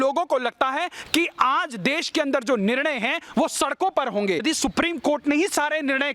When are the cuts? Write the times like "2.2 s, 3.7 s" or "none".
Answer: 4.4 s